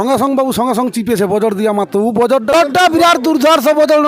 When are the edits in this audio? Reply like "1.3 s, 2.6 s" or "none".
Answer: 2.5 s